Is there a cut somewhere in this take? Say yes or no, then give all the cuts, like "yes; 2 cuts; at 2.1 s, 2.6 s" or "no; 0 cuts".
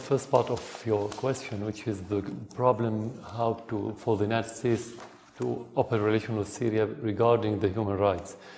yes; 1 cut; at 2.0 s